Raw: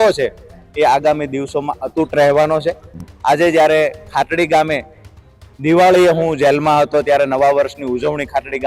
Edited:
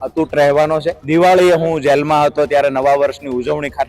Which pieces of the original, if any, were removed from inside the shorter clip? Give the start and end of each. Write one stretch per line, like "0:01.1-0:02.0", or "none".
0:02.8-0:05.5